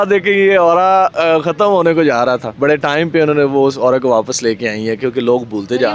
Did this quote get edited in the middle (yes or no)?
no